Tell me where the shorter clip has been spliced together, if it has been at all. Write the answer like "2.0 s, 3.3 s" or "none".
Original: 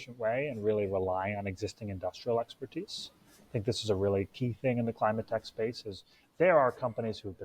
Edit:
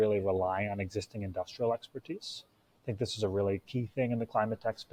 none